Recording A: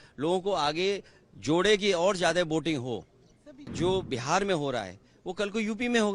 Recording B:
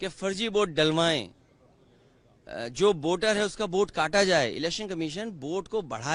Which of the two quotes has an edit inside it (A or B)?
A